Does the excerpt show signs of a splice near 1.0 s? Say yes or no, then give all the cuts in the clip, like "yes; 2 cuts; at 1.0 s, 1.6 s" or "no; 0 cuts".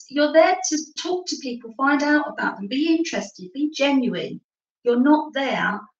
yes; 1 cut; at 1.0 s